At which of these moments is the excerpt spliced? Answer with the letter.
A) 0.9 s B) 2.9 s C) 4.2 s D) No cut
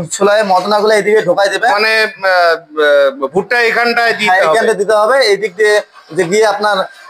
D